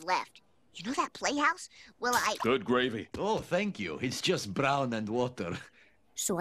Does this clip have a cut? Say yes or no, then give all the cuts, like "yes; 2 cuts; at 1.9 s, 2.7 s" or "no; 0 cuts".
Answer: yes; 1 cut; at 1.1 s